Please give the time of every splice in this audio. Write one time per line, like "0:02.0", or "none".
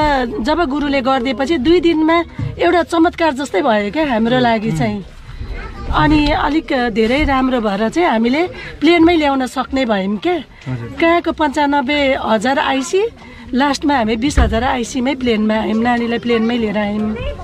none